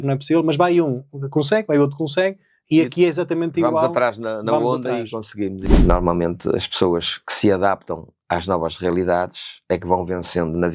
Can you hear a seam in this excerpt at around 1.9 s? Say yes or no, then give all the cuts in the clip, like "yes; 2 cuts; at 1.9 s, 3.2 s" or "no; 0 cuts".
no; 1 cut; at 5.7 s